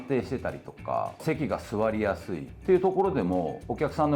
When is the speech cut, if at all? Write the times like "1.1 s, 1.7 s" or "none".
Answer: 2.5 s